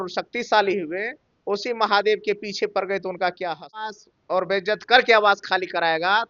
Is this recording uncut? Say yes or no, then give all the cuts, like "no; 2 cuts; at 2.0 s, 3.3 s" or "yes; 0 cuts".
no; 1 cut; at 4.1 s